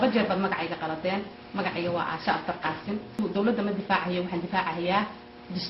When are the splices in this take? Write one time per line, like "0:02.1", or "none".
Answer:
0:03.2